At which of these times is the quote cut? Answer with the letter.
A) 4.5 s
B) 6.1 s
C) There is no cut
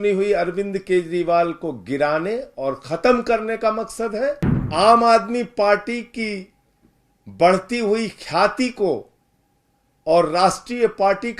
A